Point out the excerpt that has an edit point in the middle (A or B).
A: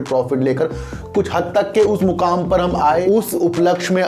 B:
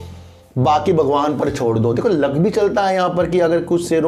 A